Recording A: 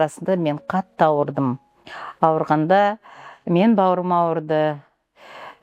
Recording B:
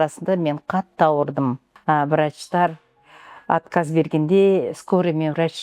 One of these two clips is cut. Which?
B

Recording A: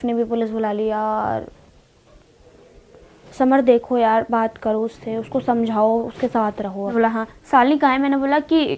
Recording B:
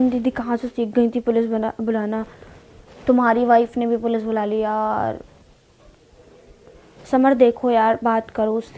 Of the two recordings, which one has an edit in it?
A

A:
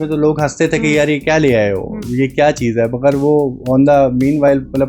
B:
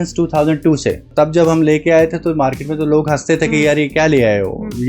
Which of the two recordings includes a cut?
B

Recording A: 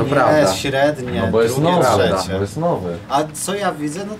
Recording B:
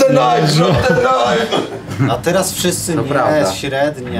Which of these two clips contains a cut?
B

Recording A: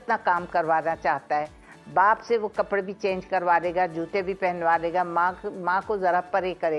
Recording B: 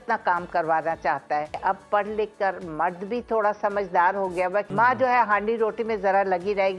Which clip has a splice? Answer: B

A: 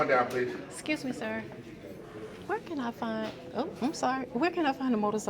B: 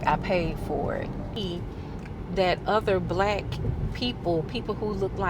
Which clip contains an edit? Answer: B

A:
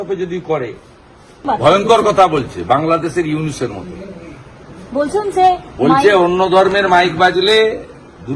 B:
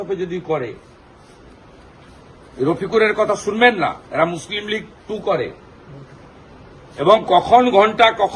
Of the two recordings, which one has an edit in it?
A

